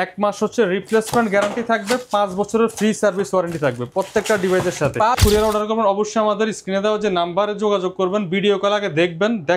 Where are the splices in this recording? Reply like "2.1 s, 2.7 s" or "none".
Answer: 5.2 s